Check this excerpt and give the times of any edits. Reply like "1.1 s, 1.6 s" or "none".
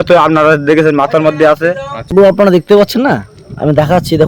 2.1 s